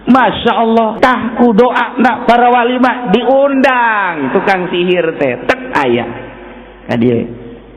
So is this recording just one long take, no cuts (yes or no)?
no